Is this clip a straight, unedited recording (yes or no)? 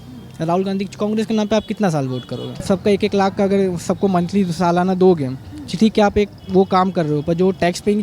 no